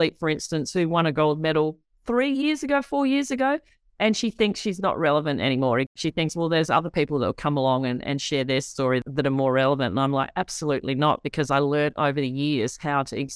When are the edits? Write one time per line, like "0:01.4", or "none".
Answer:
0:05.9
0:09.0